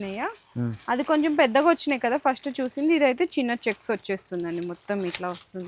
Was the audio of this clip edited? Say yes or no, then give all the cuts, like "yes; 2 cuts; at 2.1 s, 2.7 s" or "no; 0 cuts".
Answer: no; 0 cuts